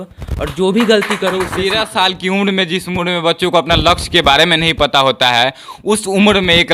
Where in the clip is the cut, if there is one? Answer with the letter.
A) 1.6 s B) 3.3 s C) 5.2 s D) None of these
A